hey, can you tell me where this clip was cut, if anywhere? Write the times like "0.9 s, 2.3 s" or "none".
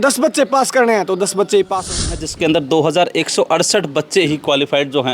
2.0 s